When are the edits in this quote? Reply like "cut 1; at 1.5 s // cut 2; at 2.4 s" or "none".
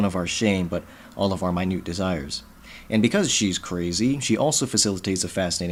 none